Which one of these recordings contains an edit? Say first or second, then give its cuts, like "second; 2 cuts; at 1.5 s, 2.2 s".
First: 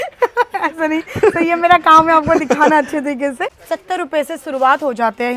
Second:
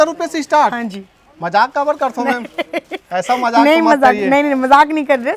first; 1 cut; at 3.6 s